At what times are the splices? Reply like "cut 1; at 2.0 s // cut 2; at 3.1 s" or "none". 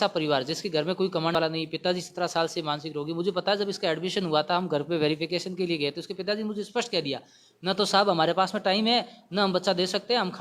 cut 1; at 1.3 s

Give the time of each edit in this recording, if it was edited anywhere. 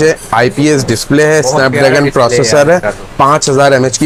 none

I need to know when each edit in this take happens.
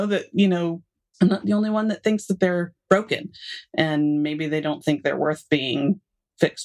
none

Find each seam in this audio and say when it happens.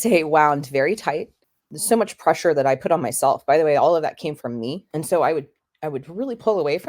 cut 1; at 1.4 s

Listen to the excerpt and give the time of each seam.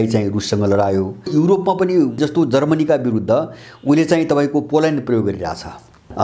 cut 1; at 1.3 s // cut 2; at 2.2 s

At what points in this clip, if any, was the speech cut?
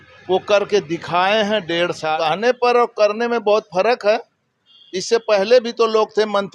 cut 1; at 2.1 s

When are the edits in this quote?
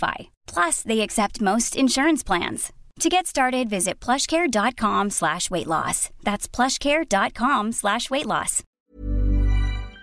cut 1; at 8.7 s

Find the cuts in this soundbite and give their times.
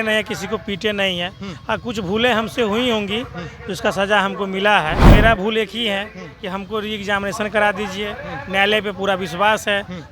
cut 1; at 5.1 s

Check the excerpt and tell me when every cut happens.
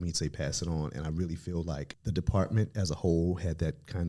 cut 1; at 1.9 s

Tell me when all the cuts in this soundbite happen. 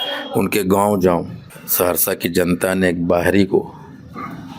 cut 1; at 1.4 s

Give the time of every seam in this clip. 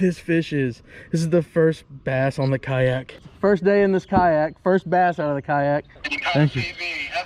cut 1; at 3.3 s // cut 2; at 6.0 s

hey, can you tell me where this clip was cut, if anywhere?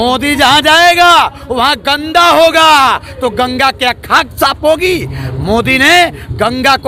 none

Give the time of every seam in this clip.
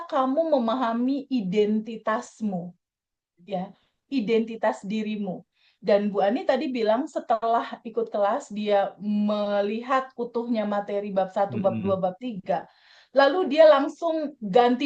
none

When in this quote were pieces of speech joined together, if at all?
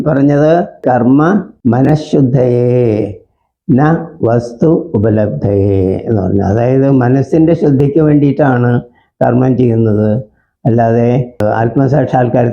cut 1; at 0.8 s // cut 2; at 1.5 s // cut 3; at 11.4 s

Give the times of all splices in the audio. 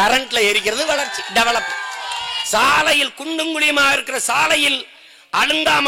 cut 1; at 2.4 s

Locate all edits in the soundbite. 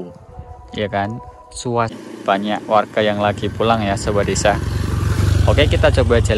cut 1; at 1.9 s

